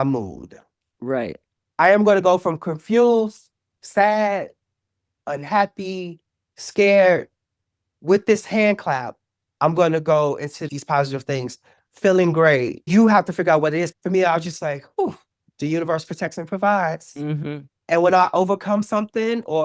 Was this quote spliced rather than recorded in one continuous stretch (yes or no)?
yes